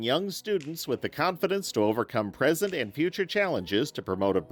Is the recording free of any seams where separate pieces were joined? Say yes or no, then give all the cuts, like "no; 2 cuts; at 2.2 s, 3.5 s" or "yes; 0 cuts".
yes; 0 cuts